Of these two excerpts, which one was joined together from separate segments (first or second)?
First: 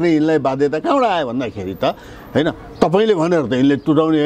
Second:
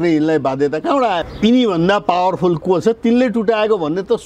second